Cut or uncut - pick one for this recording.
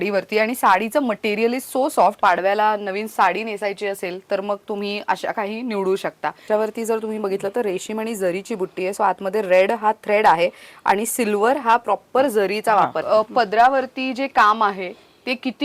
cut